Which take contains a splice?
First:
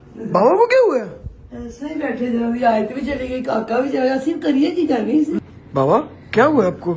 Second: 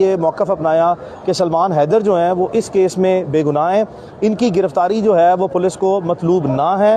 first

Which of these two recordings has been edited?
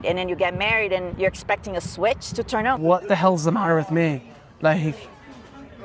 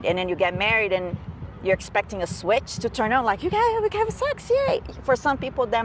first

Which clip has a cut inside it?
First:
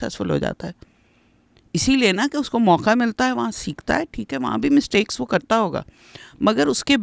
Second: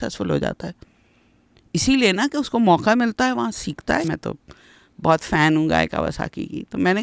second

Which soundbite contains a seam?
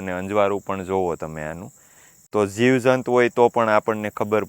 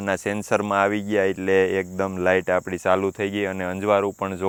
first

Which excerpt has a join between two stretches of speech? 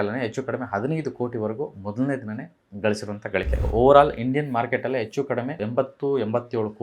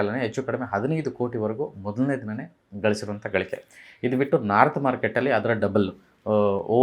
first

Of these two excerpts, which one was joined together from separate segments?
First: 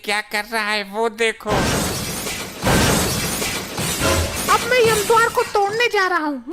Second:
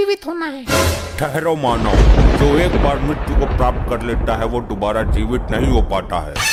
first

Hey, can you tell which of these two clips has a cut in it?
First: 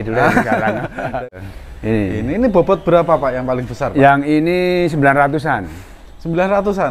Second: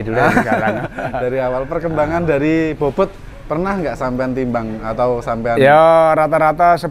first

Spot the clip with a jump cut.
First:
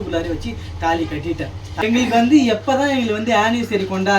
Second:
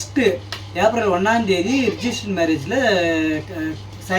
first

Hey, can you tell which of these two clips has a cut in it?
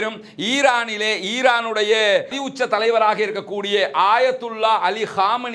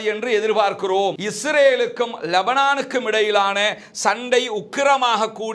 second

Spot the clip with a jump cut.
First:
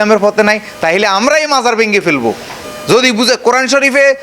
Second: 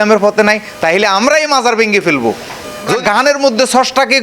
second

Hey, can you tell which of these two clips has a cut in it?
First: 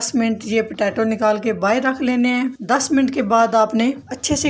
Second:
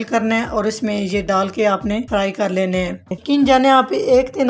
second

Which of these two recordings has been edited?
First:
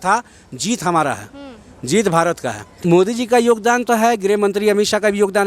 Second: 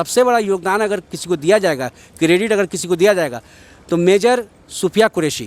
first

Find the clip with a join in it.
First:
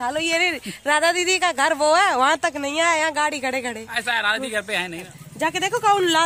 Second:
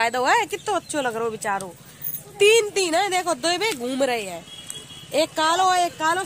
first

